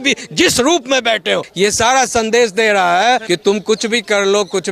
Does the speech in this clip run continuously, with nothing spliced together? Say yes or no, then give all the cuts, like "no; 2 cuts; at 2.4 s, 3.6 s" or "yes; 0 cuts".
no; 2 cuts; at 1.5 s, 3.2 s